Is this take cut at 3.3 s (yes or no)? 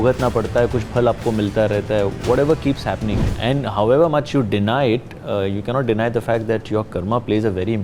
yes